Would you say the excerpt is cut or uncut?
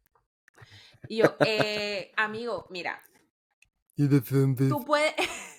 uncut